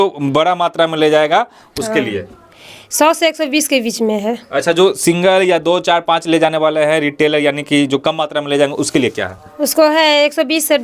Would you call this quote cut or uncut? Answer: uncut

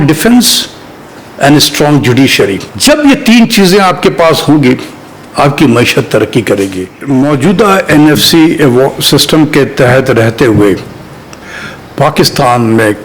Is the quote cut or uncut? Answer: cut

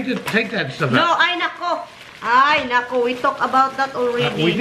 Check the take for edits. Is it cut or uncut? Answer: uncut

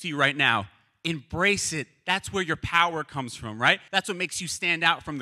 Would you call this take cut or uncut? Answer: cut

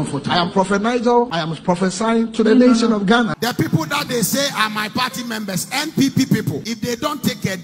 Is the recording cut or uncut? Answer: cut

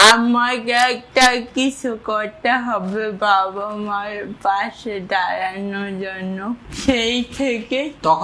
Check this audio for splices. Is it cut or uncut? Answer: cut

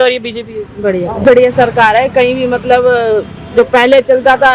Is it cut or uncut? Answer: cut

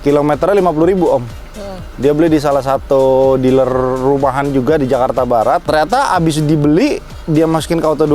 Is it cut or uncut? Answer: uncut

